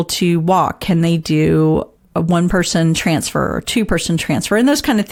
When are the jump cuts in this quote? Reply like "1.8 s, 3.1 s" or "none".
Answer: none